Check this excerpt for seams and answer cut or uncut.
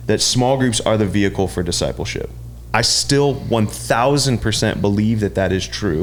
uncut